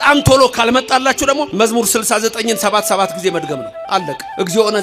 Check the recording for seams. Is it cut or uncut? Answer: cut